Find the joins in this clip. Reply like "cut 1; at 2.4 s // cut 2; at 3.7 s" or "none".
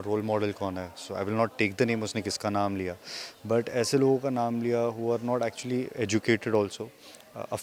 none